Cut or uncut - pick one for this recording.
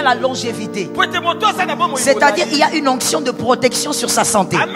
uncut